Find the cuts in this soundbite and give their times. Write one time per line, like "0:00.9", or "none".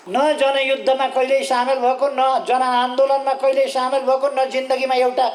none